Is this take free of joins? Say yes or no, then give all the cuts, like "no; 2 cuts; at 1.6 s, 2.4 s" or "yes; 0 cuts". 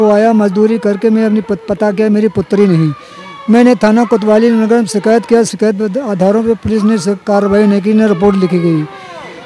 yes; 0 cuts